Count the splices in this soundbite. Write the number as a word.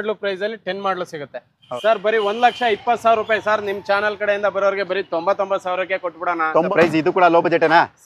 two